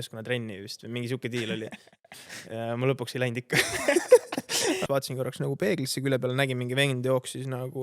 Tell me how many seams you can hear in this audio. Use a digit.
1